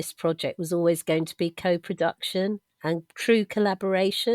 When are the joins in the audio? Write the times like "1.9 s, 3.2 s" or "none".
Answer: 3.1 s